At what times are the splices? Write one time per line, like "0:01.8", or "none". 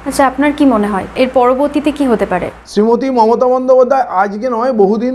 0:01.1
0:02.5

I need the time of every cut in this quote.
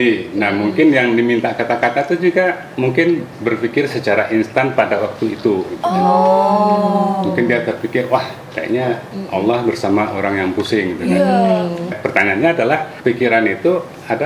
0:09.1
0:12.0
0:12.9

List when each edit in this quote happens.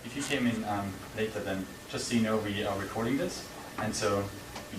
0:03.3

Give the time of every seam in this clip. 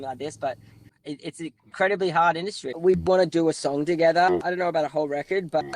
0:02.7

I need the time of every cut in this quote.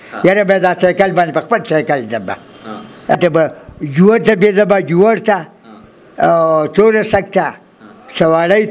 0:03.2

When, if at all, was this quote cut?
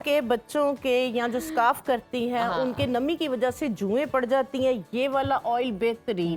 none

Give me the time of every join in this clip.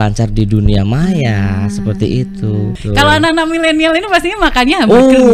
0:02.8

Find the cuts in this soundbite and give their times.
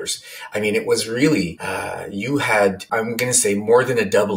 0:01.6
0:02.8

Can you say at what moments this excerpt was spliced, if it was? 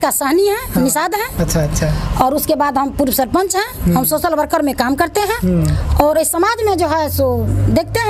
none

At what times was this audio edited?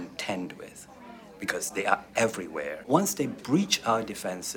0:02.8

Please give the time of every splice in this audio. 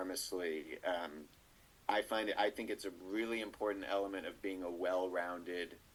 none

